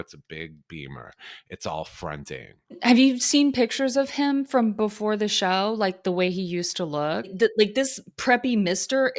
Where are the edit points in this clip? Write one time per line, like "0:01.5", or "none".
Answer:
0:02.8
0:07.4